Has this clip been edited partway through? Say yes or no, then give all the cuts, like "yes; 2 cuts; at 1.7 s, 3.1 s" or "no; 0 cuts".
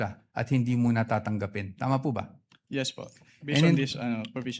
no; 0 cuts